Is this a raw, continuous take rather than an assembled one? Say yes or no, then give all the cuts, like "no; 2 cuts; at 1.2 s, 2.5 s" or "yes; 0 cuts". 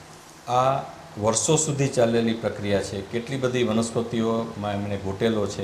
yes; 0 cuts